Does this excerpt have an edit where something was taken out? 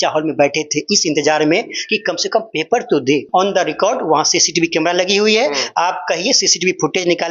yes; 1 cut; at 3.3 s

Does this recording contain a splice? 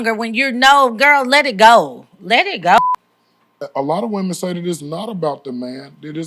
yes; 1 cut; at 2.8 s

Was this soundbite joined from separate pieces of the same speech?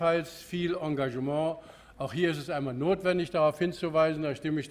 yes; 1 cut; at 3.3 s

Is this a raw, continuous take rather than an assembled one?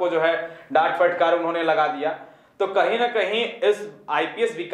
yes; 0 cuts

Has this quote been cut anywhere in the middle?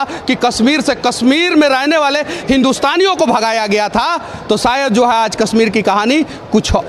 no; 0 cuts

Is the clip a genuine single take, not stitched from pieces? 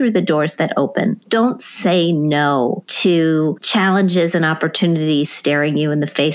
no; 3 cuts; at 1.2 s, 2.9 s, 3.6 s

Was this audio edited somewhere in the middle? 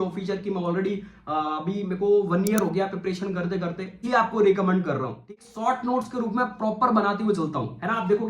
yes; 2 cuts; at 4.0 s, 5.2 s

